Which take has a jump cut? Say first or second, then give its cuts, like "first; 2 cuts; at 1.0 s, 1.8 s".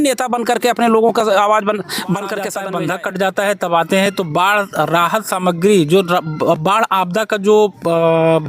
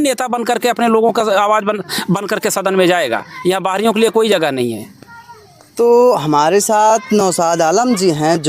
first; 1 cut; at 2.5 s